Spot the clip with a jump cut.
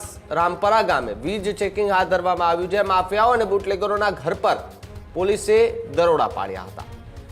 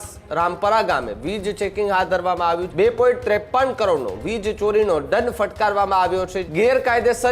second; 2 cuts; at 2.7 s, 6.4 s

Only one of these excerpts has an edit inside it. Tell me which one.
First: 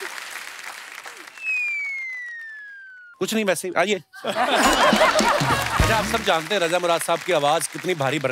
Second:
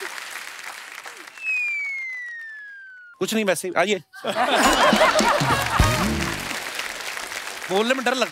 first; 1 cut; at 5.9 s

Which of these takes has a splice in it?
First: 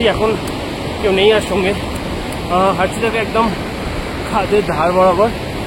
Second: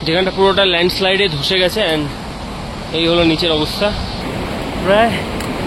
second; 1 cut; at 4.2 s

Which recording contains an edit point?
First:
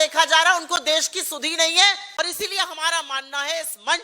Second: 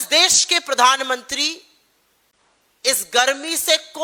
first; 1 cut; at 2.2 s

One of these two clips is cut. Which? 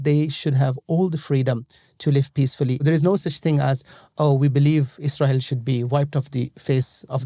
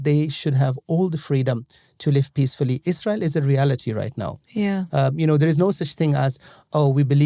first; 1 cut; at 2.8 s

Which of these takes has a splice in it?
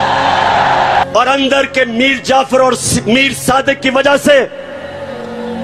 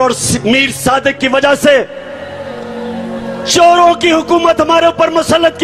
first; 1 cut; at 1.0 s

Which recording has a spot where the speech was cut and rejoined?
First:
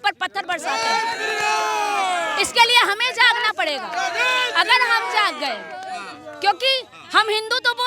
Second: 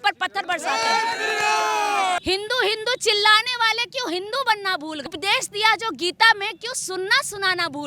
second; 2 cuts; at 2.2 s, 5.1 s

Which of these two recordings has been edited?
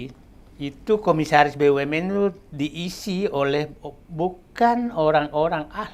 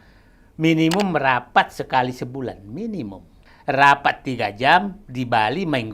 second; 1 cut; at 3.4 s

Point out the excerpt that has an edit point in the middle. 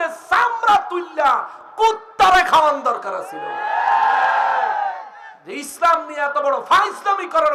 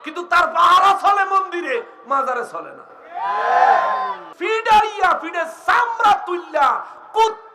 second; 1 cut; at 4.3 s

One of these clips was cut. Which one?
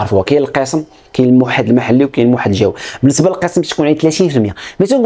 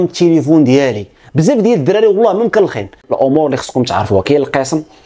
second; 1 cut; at 3.0 s

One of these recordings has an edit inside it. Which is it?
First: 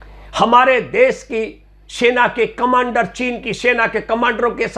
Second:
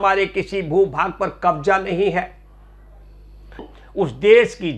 second; 1 cut; at 3.7 s

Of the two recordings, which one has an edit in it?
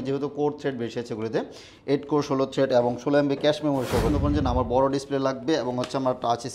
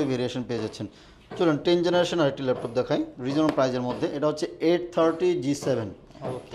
first; 1 cut; at 4.1 s

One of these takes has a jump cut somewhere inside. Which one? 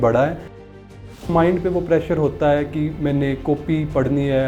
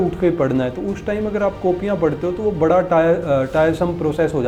first; 1 cut; at 1.0 s

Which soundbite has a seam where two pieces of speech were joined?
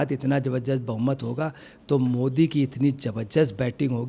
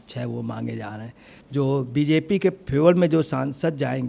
second; 1 cut; at 1.4 s

